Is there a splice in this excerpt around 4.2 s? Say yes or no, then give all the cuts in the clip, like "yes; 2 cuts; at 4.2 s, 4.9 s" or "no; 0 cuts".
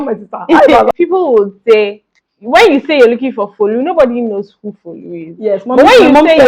no; 1 cut; at 0.9 s